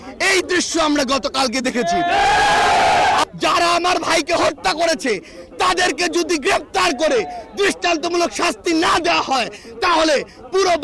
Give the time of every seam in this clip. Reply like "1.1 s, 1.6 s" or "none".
3.2 s